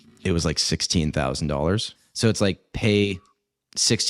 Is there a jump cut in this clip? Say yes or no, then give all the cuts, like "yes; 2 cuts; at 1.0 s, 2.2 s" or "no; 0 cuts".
yes; 1 cut; at 2.0 s